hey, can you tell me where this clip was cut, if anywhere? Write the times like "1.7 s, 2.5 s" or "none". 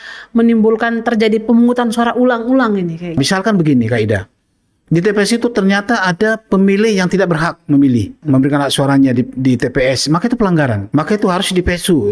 3.1 s, 8.2 s, 10.8 s